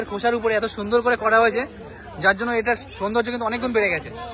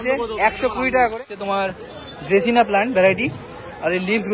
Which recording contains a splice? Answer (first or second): second